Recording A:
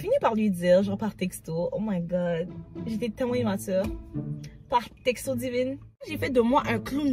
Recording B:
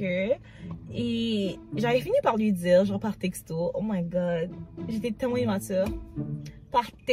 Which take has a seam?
A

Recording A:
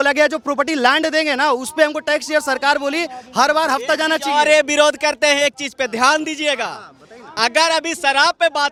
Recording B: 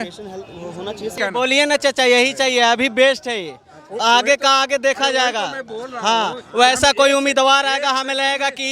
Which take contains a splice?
B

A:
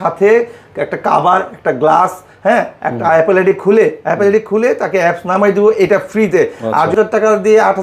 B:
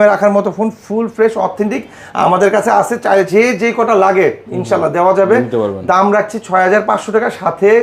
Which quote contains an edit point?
A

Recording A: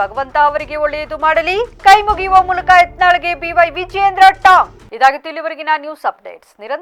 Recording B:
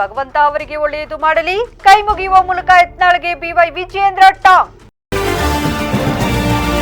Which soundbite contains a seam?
B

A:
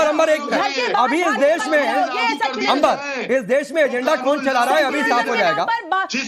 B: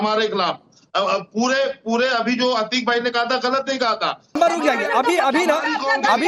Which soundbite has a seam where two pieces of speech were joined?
B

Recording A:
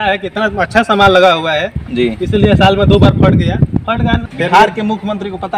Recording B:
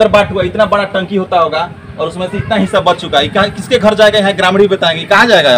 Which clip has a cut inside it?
A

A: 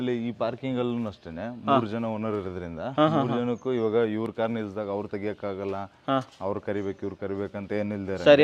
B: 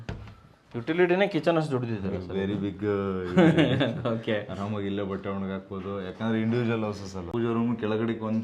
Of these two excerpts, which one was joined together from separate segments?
B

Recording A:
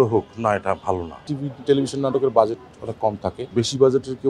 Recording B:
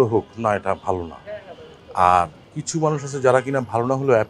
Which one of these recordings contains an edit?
A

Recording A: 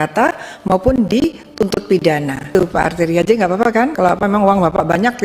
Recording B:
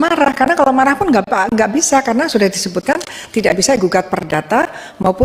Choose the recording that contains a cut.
A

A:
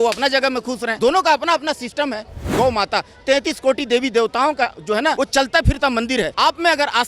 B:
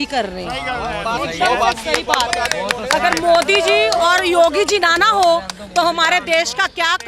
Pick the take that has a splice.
A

